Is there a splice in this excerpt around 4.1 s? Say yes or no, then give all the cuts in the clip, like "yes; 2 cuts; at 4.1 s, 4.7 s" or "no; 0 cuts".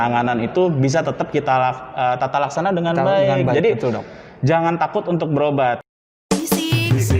no; 1 cut; at 5.9 s